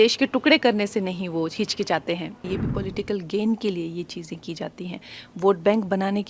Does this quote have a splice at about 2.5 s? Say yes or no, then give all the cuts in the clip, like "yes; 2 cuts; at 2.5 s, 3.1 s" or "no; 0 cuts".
yes; 1 cut; at 2.5 s